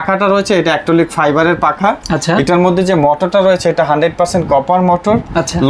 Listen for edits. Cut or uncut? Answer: uncut